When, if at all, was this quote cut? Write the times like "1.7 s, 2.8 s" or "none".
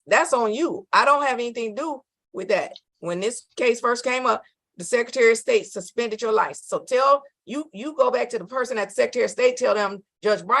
2.8 s